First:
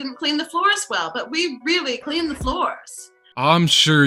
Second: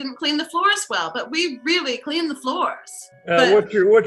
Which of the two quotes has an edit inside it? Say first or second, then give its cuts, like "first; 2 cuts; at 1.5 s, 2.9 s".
second; 1 cut; at 3.1 s